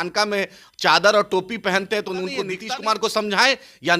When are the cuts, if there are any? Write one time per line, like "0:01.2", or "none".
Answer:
0:02.6

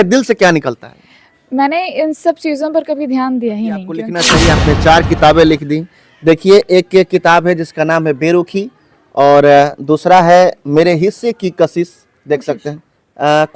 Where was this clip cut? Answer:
0:04.2

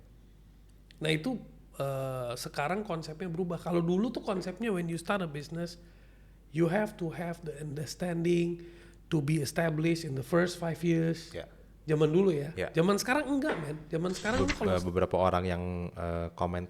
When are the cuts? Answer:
0:14.7

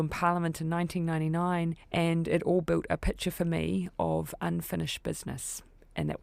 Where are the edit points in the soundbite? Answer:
0:01.8

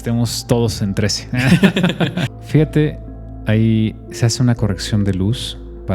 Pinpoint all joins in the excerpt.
0:02.2

